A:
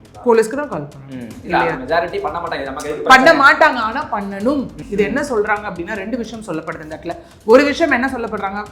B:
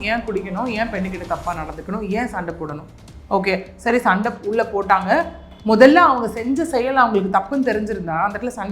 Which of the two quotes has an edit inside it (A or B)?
A